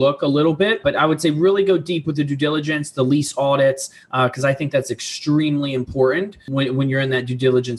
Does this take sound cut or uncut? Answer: cut